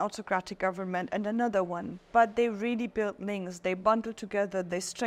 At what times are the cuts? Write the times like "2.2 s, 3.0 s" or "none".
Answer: none